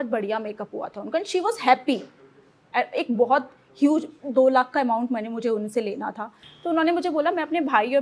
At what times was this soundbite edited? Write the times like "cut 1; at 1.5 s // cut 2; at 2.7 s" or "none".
cut 1; at 6.4 s